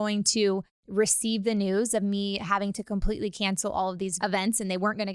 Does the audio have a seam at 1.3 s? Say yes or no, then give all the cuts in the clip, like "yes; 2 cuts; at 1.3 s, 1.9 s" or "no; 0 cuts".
no; 1 cut; at 4.1 s